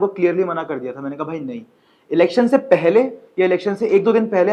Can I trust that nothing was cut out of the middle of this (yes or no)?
yes